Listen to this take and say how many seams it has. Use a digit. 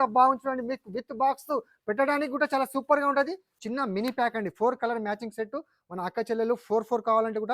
1